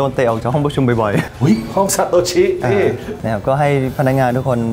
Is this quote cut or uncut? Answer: cut